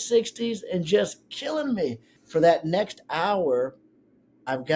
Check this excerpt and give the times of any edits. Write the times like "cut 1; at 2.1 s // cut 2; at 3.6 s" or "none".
cut 1; at 2.1 s